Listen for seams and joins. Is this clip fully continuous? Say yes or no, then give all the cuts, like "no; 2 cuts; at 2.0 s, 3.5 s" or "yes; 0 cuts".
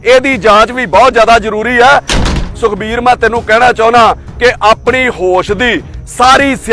no; 1 cut; at 2.3 s